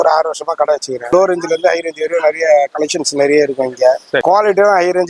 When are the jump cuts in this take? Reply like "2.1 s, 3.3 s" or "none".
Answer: 1.1 s, 4.2 s